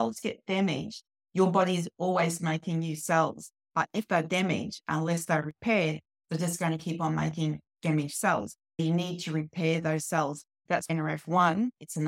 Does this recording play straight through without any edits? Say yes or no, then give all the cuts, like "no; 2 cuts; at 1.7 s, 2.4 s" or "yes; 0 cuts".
no; 2 cuts; at 8.8 s, 10.7 s